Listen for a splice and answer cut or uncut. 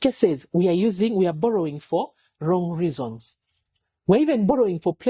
uncut